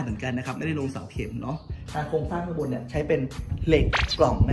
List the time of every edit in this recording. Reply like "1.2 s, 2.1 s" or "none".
1.8 s